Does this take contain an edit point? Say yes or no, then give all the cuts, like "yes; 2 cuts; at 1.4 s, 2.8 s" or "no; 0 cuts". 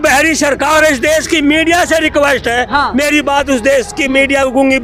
no; 0 cuts